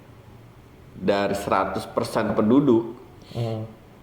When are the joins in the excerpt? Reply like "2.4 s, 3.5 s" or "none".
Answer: none